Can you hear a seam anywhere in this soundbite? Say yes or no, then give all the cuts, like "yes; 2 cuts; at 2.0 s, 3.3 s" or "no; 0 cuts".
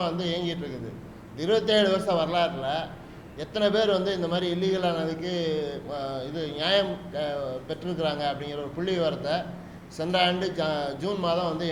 no; 0 cuts